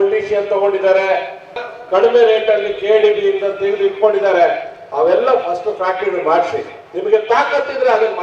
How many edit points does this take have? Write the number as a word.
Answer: one